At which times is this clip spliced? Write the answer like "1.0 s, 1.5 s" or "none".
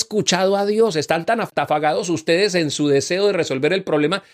1.5 s